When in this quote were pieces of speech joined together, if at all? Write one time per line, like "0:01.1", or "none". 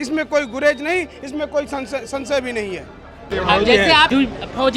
none